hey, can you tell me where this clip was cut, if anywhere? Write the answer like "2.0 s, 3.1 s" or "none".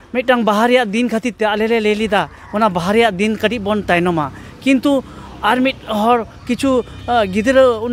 none